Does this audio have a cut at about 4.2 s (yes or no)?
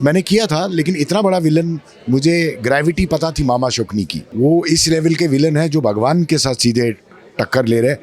yes